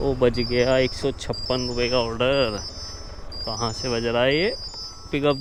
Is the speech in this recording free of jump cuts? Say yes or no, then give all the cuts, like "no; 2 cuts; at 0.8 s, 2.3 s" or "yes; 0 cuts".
yes; 0 cuts